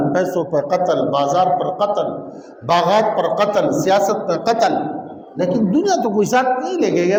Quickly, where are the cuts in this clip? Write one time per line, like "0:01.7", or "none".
none